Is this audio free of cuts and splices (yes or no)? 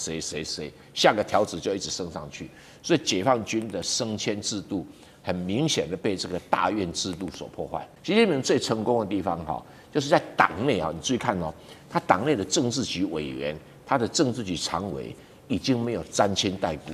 no